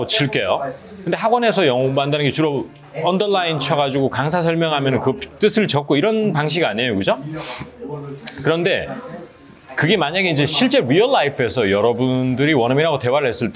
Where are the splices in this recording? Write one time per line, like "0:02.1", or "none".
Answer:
none